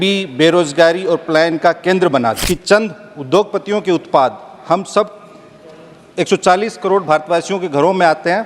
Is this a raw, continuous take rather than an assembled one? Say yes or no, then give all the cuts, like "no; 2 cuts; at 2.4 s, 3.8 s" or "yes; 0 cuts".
no; 1 cut; at 2.4 s